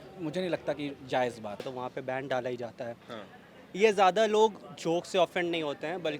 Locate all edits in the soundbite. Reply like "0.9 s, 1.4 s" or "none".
1.7 s